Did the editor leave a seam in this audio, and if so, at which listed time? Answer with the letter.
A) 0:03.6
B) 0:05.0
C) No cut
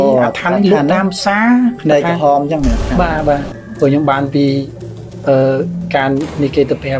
A